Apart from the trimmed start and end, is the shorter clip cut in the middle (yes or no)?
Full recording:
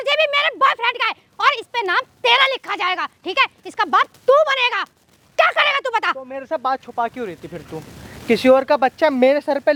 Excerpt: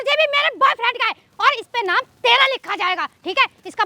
no